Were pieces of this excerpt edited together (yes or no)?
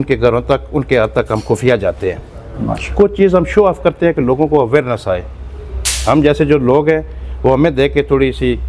no